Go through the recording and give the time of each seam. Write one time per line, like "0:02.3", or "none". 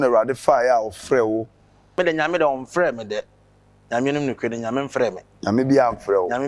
0:01.9

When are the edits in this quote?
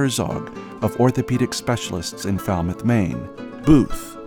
none

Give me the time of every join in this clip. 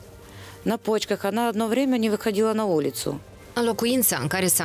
0:03.3

